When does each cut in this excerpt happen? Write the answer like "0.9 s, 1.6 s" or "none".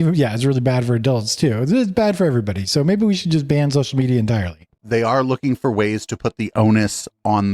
4.6 s